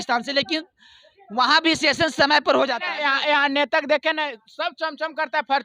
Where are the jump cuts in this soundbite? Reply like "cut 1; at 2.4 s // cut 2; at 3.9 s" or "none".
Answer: cut 1; at 2.8 s